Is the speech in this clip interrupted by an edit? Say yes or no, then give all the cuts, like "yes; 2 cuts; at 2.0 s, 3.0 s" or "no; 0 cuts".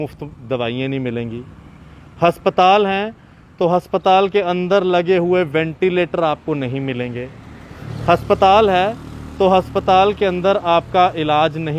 no; 0 cuts